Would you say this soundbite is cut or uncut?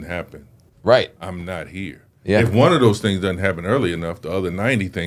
uncut